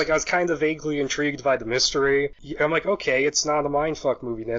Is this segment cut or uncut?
cut